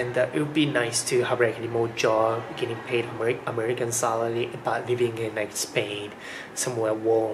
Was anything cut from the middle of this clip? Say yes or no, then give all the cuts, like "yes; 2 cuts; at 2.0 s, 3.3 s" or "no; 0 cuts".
no; 0 cuts